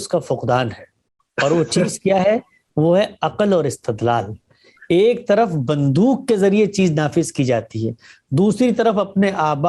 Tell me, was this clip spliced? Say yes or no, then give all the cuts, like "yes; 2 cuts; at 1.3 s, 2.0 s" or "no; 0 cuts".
no; 0 cuts